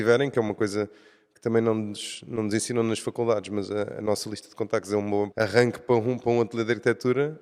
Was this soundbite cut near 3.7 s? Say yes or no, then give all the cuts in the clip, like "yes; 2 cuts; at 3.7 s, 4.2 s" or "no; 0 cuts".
no; 1 cut; at 5.3 s